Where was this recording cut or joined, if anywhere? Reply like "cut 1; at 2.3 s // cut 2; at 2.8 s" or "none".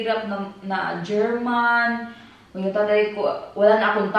none